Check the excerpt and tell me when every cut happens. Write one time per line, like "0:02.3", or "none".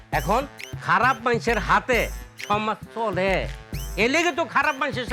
none